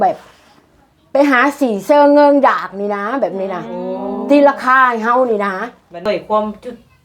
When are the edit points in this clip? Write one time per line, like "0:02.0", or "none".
0:06.0